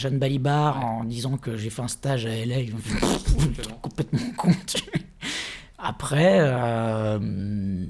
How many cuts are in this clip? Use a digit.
0